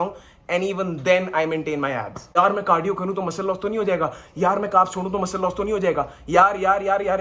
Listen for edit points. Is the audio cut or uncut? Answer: cut